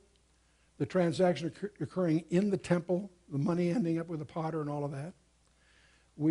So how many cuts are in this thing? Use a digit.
0